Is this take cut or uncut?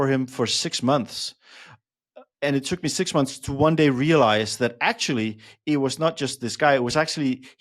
uncut